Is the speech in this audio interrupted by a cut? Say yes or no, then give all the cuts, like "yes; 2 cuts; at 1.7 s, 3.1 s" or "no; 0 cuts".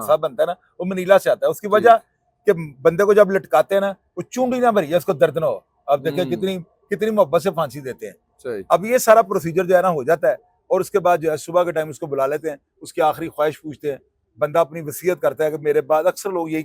no; 0 cuts